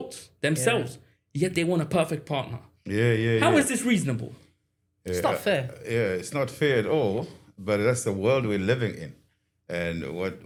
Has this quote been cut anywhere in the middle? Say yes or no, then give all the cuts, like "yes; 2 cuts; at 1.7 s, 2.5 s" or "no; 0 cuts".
no; 0 cuts